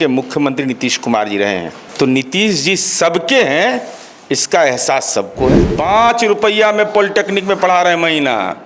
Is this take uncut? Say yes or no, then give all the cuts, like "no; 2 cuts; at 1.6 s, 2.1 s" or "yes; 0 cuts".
no; 2 cuts; at 1.8 s, 5.7 s